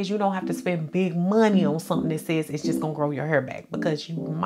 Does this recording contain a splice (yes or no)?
no